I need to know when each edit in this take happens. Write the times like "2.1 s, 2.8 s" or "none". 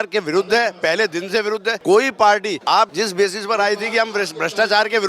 1.7 s, 2.7 s